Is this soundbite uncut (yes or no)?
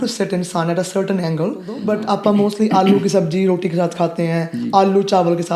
no